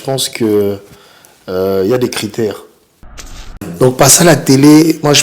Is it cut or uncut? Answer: cut